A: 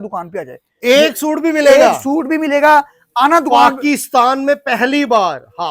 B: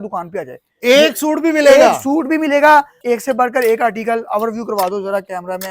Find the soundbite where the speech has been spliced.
B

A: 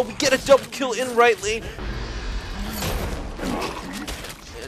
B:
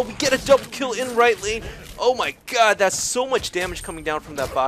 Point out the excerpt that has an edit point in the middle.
A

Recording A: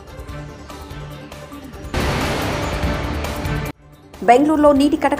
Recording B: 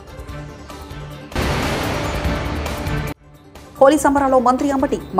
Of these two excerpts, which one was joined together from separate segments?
B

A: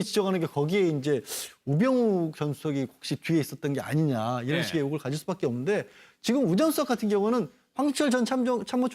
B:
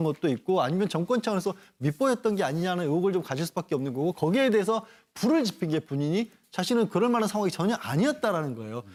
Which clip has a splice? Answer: A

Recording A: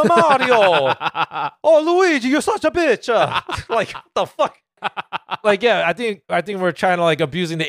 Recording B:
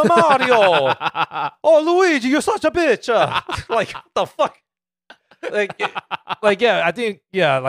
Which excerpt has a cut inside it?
A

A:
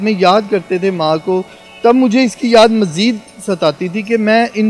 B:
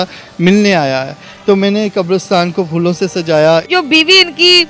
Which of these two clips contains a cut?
B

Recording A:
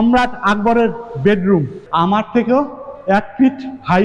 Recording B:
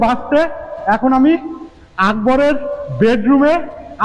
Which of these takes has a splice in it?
A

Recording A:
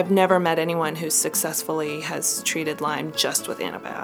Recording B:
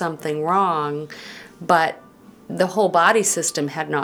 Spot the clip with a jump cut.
A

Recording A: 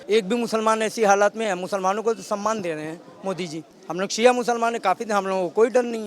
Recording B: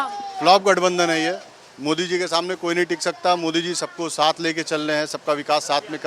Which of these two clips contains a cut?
A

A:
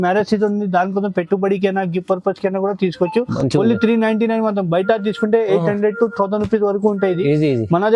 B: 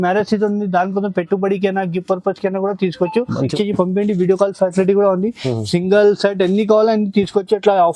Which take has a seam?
B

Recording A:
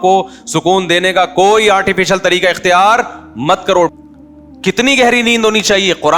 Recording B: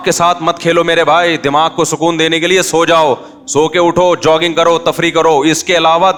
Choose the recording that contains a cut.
A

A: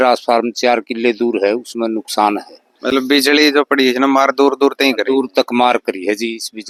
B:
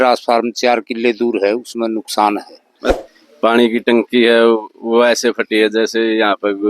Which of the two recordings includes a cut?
B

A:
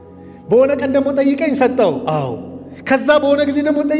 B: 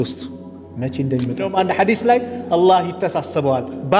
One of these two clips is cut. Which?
B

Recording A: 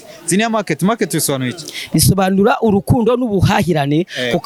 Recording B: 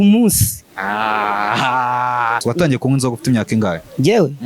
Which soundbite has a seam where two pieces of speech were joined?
B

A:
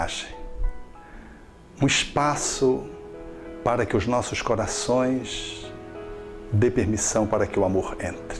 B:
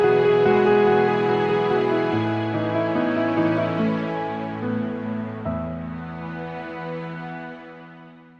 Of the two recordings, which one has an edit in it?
B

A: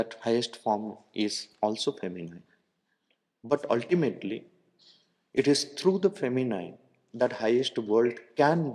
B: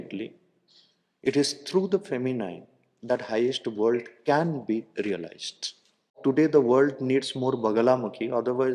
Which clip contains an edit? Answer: B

